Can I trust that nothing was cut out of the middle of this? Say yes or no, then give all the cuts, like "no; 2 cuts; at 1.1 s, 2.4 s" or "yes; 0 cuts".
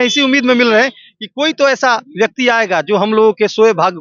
yes; 0 cuts